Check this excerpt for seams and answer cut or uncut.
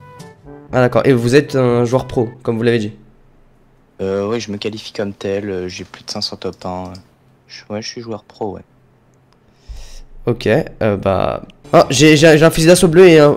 cut